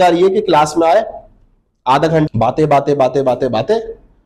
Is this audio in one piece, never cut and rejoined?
no; 1 cut; at 2.3 s

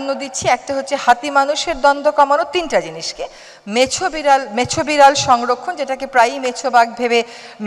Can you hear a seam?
no; 0 cuts

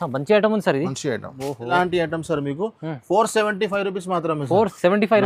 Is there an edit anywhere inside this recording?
yes; 1 cut; at 1.7 s

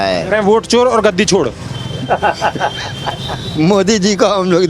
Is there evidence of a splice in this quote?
no; 0 cuts

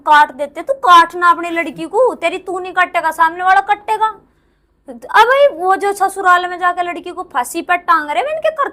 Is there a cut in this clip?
no; 0 cuts

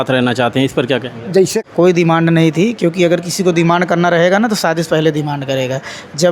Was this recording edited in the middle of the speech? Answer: yes; 1 cut; at 1.6 s

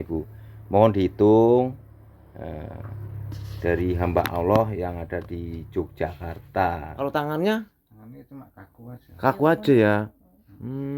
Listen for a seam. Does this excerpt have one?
yes; 1 cut; at 6.9 s

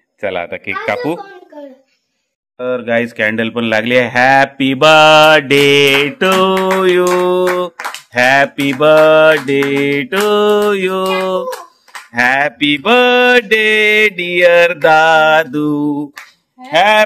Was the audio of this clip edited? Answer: no; 0 cuts

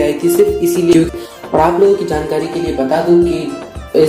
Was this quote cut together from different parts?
yes; 1 cut; at 1.1 s

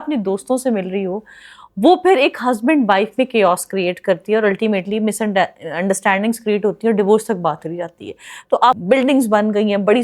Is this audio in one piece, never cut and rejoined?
no; 1 cut; at 8.8 s

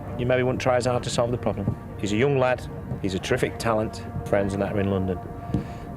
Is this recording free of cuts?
yes; 0 cuts

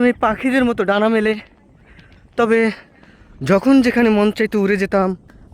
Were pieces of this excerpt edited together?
no; 0 cuts

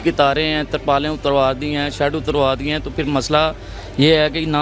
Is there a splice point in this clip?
no; 0 cuts

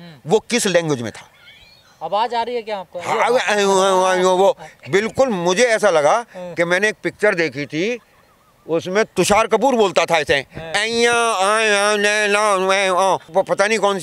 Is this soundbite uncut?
yes; 0 cuts

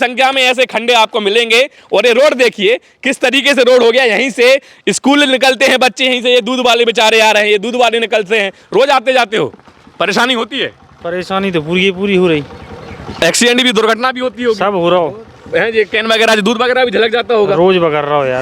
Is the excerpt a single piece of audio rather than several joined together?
yes; 0 cuts

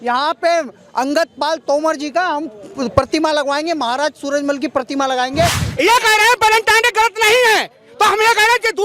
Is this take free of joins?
no; 1 cut; at 5.6 s

